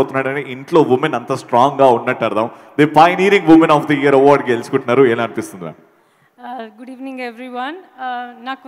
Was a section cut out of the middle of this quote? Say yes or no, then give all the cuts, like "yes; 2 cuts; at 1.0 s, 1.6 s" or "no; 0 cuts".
no; 0 cuts